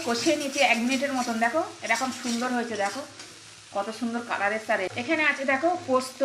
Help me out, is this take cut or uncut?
cut